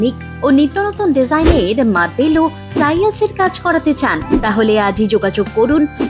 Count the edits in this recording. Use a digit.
0